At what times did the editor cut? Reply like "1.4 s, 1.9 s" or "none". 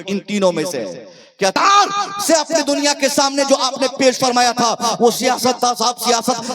1.5 s